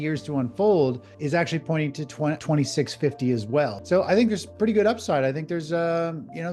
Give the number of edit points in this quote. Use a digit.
3